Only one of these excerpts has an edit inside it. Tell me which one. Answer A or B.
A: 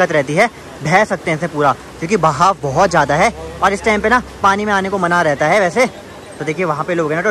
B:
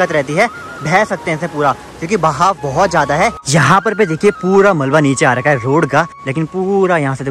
B